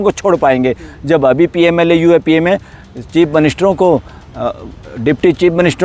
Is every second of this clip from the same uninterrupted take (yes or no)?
yes